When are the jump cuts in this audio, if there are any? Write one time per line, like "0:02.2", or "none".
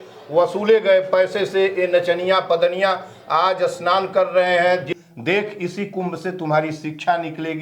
0:04.9